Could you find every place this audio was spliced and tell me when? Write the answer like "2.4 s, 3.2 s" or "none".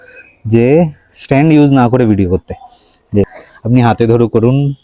3.4 s